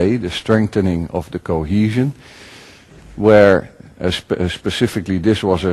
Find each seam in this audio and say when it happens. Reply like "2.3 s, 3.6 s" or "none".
1.2 s